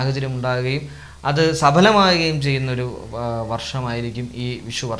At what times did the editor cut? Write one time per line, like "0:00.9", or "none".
none